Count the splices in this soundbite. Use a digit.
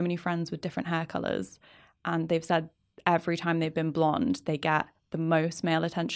0